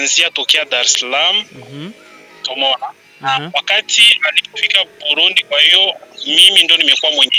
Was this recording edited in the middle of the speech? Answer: no; 0 cuts

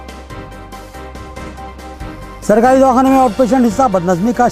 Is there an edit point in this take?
no; 0 cuts

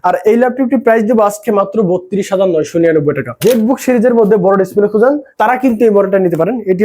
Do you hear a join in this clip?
yes; 2 cuts; at 3.3 s, 5.3 s

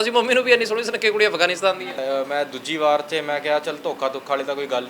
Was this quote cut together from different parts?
yes; 1 cut; at 1.9 s

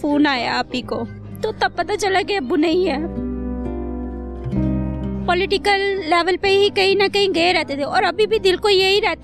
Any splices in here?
yes; 3 cuts; at 1.2 s, 3.1 s, 5.0 s

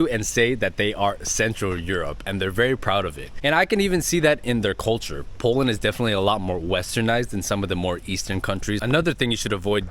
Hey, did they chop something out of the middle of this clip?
yes; 1 cut; at 8.8 s

